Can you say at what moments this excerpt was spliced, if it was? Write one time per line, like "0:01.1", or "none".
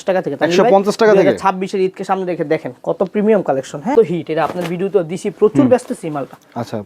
0:03.9